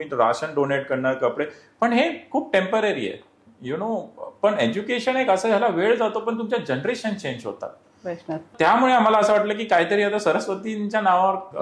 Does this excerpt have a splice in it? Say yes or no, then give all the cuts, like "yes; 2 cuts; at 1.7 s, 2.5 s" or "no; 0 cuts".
no; 0 cuts